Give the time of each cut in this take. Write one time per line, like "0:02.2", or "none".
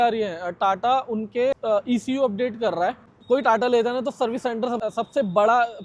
0:01.6
0:03.2
0:04.8